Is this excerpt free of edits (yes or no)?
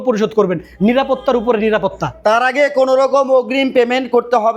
yes